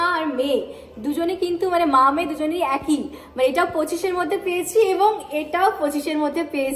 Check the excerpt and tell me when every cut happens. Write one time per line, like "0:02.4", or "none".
none